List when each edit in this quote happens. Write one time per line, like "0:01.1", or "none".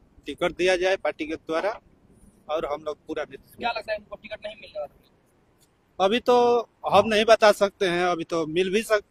none